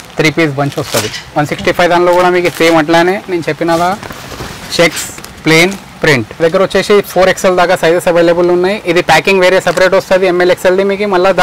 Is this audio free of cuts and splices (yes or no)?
no